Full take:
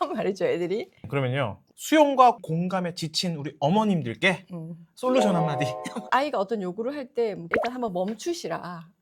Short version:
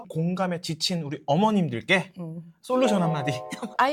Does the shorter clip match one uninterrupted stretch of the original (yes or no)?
yes